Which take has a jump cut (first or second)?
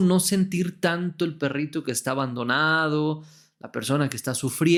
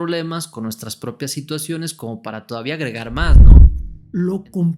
second